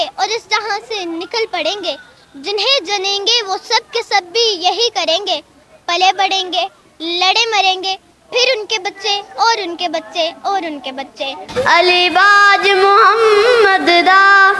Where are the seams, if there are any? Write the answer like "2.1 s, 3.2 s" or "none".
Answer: 11.5 s

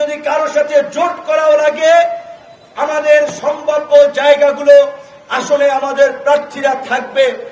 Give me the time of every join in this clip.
none

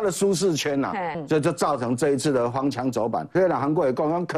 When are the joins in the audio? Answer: 1.2 s, 3.3 s

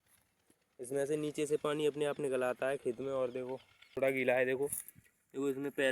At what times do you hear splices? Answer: 3.9 s

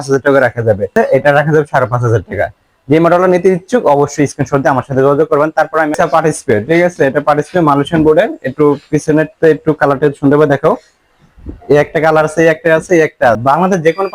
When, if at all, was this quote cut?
0.9 s, 5.9 s, 13.4 s

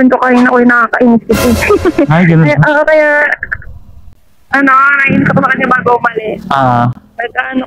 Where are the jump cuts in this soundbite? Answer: none

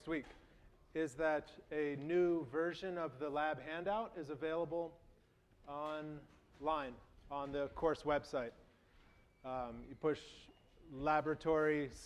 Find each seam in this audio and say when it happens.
none

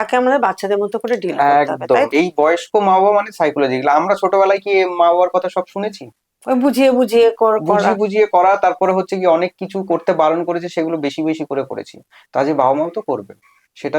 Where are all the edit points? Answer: 2.1 s

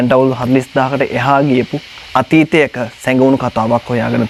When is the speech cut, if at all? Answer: none

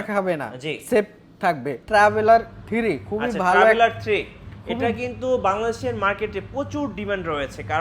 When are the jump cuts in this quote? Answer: 1.8 s

